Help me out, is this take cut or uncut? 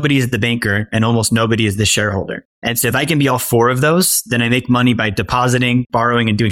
uncut